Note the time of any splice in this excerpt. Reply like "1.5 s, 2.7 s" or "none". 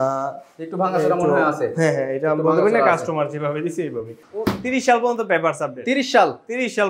4.2 s